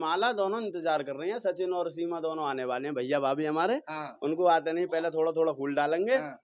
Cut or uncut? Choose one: uncut